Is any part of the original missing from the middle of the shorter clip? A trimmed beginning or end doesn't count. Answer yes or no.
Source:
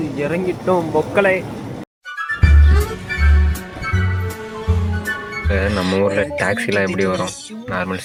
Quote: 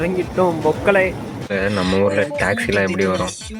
yes